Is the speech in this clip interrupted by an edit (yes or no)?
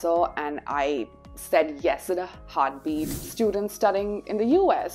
yes